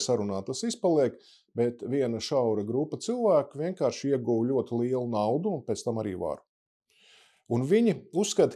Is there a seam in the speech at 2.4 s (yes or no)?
no